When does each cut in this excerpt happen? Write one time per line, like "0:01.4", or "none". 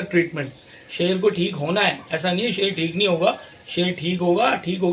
none